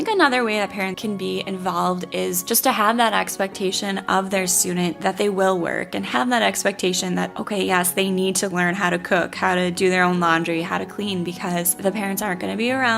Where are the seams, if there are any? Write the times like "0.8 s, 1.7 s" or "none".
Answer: 1.0 s

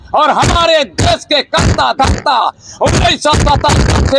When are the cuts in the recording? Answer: none

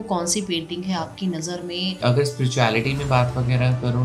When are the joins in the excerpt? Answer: 2.0 s

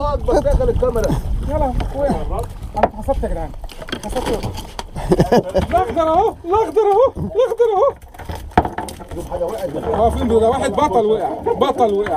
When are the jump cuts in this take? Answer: none

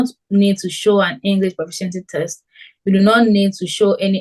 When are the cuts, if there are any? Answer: none

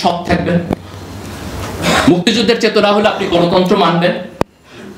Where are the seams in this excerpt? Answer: none

